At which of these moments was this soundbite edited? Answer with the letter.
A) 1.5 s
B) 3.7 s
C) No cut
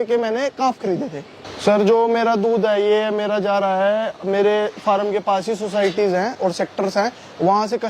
A